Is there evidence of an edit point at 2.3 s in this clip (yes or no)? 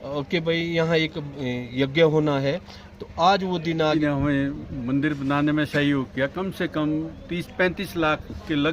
no